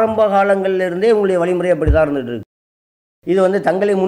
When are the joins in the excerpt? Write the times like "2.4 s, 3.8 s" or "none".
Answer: 2.9 s